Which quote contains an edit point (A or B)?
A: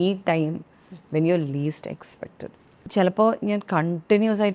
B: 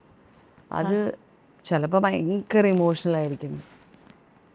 A